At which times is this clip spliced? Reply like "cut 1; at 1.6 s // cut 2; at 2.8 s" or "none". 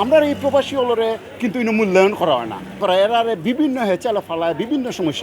cut 1; at 2.8 s